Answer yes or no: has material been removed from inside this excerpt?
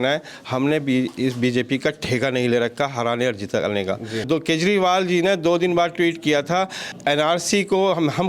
yes